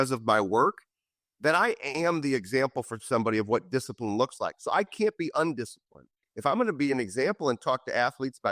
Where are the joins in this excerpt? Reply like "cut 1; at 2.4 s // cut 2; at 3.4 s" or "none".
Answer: cut 1; at 6.3 s